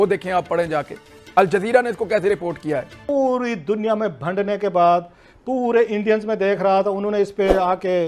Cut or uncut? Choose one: cut